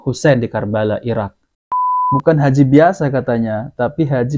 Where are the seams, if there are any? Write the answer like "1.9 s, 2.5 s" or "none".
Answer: 1.6 s